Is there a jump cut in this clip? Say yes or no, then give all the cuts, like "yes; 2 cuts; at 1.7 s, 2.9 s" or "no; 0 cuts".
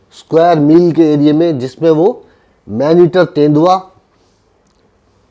no; 0 cuts